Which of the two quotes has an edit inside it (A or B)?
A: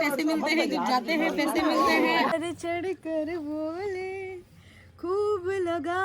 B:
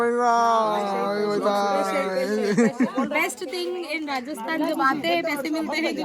A